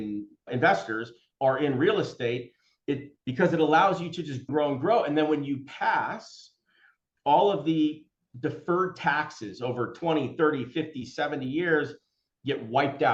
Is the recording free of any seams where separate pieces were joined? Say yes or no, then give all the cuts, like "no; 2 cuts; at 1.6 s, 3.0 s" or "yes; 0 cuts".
yes; 0 cuts